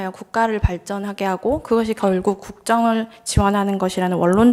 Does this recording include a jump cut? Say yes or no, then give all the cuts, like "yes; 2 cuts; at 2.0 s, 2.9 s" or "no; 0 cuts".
no; 0 cuts